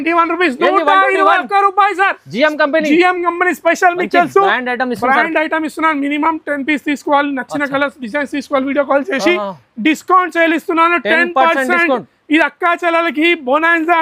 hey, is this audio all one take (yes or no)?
yes